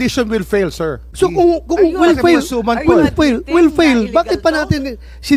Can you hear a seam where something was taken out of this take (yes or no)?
yes